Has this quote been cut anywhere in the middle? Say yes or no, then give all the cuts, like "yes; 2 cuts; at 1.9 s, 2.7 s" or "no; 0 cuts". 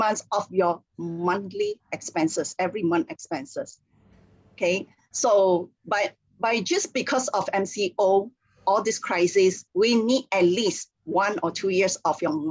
no; 0 cuts